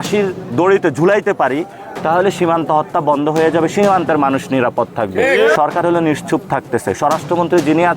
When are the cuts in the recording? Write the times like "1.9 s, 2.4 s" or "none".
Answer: 5.4 s